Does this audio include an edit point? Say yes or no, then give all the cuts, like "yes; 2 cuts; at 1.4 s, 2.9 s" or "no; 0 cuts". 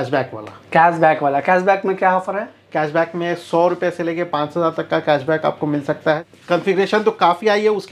yes; 1 cut; at 6.2 s